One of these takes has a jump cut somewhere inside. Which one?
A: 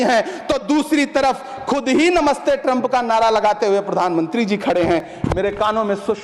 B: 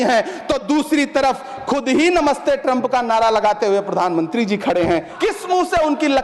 B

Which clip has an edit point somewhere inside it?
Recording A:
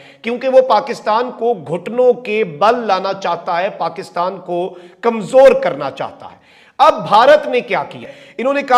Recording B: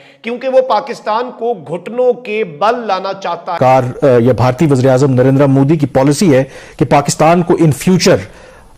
B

